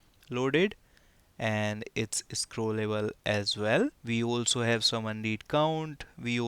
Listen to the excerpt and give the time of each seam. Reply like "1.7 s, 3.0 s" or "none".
4.0 s